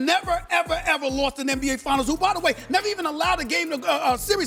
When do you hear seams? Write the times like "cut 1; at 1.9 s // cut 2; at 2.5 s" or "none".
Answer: none